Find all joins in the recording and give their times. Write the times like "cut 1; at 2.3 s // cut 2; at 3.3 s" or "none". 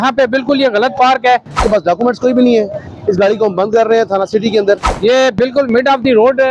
cut 1; at 1.6 s // cut 2; at 4.9 s